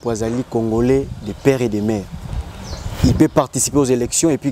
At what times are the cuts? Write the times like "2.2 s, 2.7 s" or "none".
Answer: none